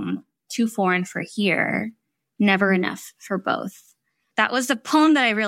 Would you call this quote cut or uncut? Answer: cut